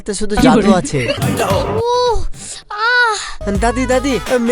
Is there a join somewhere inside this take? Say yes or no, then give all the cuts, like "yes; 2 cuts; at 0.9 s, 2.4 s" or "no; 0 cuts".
yes; 2 cuts; at 1.2 s, 3.4 s